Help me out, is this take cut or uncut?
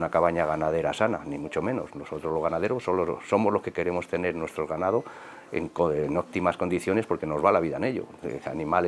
uncut